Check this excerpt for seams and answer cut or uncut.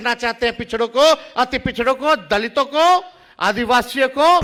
uncut